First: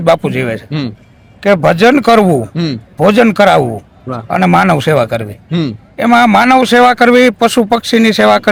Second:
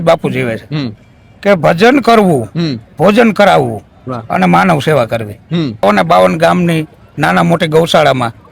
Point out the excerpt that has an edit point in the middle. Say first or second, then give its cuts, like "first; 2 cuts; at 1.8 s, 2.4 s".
second; 1 cut; at 5.8 s